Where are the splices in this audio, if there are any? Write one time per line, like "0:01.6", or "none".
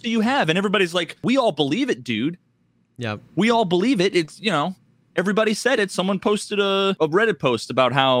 0:01.2
0:07.0